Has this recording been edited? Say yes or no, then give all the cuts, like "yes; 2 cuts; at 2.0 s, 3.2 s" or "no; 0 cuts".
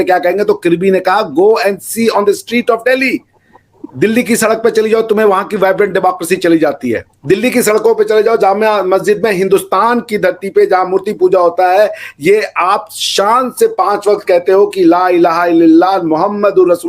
yes; 1 cut; at 7.1 s